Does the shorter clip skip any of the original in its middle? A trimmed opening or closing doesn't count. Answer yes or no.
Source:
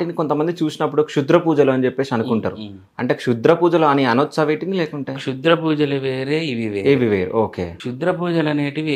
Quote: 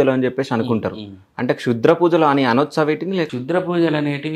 yes